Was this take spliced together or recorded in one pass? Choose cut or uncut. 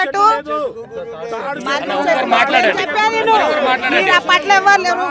uncut